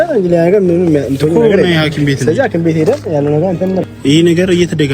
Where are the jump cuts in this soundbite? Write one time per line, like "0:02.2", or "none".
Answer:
0:03.9